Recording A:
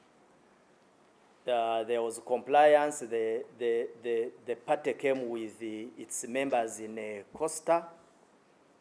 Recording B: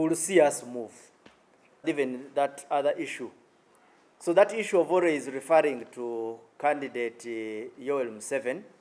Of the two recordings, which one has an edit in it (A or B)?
B